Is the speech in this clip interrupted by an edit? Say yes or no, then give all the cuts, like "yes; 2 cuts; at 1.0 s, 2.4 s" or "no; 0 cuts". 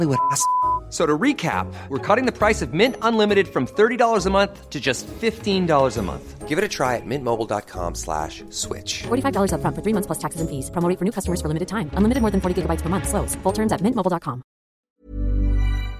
yes; 1 cut; at 14.9 s